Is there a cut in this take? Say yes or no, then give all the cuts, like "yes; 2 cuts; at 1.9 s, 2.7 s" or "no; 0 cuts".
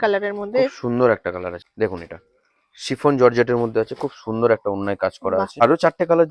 yes; 2 cuts; at 1.6 s, 5.5 s